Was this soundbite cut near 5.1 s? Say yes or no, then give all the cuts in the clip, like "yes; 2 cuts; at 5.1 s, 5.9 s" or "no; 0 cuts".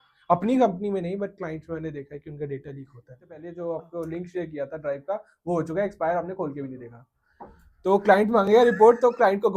no; 1 cut; at 3.5 s